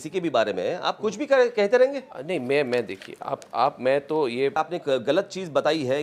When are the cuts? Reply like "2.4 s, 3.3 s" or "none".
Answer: 4.6 s